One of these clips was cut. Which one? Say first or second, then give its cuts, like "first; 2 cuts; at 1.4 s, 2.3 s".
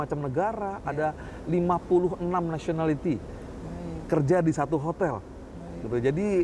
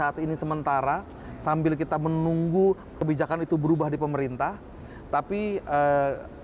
second; 1 cut; at 3.0 s